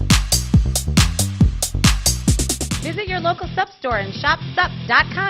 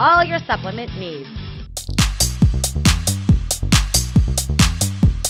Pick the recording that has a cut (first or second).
first